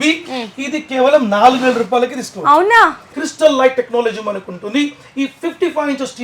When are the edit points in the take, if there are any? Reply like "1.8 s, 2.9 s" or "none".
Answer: 3.0 s